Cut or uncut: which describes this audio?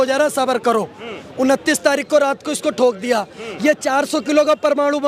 uncut